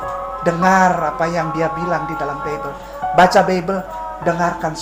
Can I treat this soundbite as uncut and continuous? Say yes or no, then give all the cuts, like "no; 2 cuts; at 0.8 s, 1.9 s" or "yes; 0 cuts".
yes; 0 cuts